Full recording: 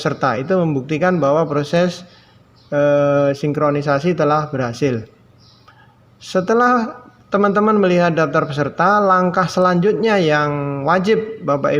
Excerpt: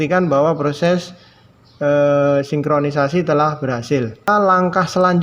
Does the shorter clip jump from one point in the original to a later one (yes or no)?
yes